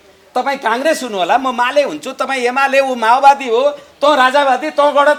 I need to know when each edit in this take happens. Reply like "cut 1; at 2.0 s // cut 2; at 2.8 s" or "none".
none